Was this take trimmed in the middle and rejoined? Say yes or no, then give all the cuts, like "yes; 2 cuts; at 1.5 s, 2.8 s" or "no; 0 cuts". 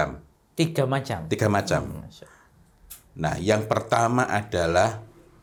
no; 0 cuts